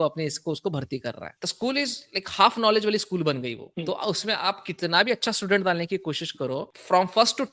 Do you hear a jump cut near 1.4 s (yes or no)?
no